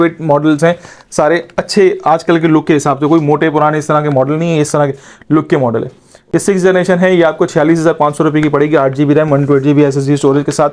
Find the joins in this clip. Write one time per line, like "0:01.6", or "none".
none